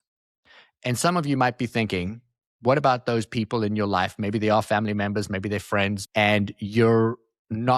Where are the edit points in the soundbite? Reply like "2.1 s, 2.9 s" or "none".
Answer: 6.0 s

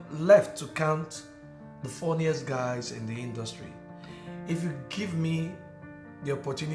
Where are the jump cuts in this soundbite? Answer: none

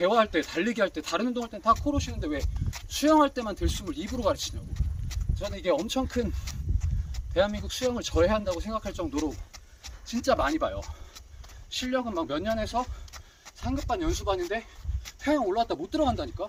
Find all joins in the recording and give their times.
none

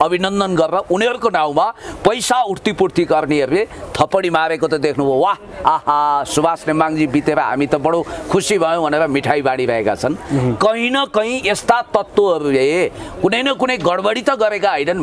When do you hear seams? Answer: none

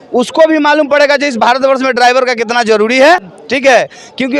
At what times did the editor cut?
none

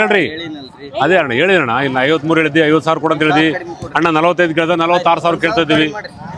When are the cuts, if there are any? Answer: none

